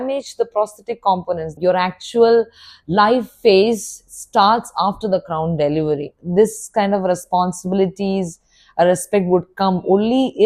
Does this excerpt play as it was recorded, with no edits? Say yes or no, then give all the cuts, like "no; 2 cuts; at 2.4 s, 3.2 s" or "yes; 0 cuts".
no; 2 cuts; at 1.5 s, 6.2 s